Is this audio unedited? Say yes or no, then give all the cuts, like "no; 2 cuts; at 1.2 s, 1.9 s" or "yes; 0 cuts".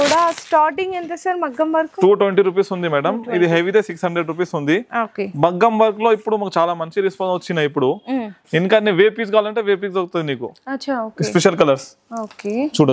yes; 0 cuts